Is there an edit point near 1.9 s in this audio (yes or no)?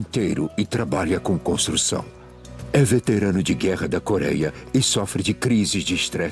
no